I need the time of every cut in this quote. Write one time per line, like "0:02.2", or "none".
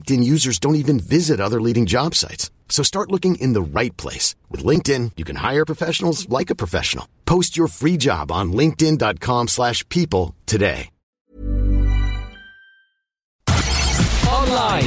0:11.1
0:13.3